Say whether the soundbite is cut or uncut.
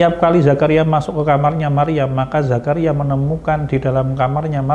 uncut